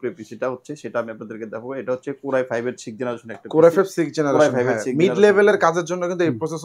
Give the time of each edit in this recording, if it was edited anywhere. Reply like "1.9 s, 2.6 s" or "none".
none